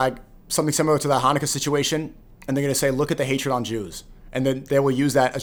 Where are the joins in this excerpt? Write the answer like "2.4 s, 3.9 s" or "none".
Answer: none